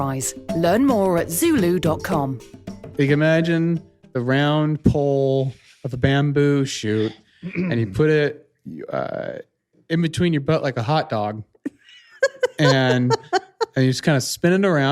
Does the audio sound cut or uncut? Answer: cut